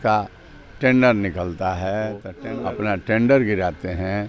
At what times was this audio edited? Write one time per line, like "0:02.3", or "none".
0:02.3